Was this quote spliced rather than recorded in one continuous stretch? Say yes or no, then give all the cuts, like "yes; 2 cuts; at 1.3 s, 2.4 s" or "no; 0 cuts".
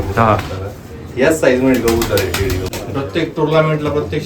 yes; 1 cut; at 2.7 s